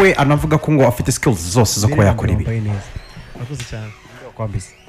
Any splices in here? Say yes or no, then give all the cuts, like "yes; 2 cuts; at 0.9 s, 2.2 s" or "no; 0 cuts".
no; 0 cuts